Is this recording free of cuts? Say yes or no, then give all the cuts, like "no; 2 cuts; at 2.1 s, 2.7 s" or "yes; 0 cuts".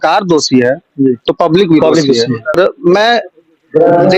no; 1 cut; at 2.6 s